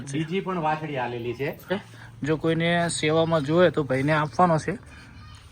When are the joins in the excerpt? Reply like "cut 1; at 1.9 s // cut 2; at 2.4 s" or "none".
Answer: cut 1; at 1.7 s